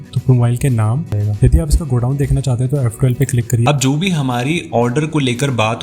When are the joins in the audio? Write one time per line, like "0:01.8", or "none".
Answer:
0:01.1
0:03.6